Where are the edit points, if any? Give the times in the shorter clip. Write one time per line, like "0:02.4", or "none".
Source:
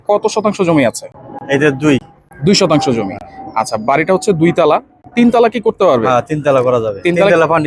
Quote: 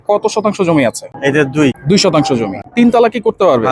0:01.5
0:02.6